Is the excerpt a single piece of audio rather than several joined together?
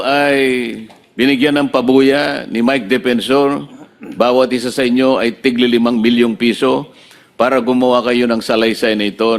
yes; 0 cuts

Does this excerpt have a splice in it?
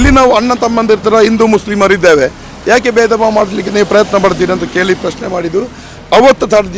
no; 0 cuts

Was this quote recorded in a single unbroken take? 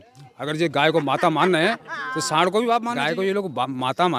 no; 1 cut; at 2.9 s

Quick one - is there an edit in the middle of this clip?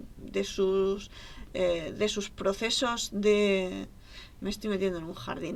no; 0 cuts

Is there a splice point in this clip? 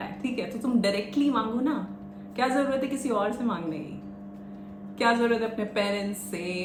no; 0 cuts

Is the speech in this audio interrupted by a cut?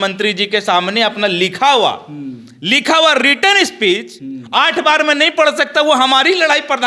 no; 0 cuts

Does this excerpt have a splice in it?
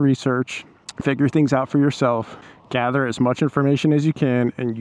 no; 0 cuts

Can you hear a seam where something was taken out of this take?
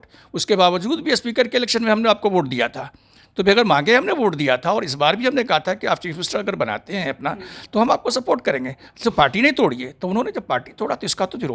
no; 0 cuts

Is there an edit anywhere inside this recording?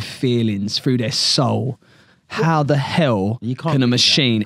no; 0 cuts

